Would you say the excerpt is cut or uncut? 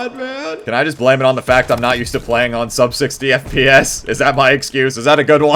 uncut